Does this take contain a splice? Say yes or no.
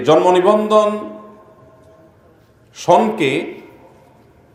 no